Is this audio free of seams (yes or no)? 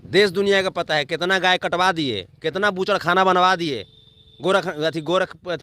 yes